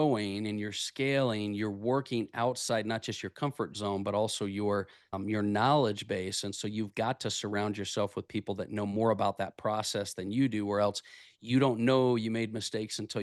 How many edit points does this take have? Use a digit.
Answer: 0